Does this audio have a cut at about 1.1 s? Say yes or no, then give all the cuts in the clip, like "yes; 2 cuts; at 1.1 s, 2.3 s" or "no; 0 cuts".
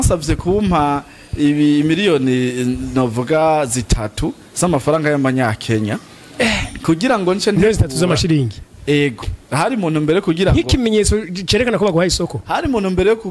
no; 0 cuts